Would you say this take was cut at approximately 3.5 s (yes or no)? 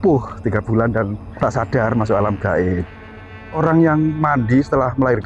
yes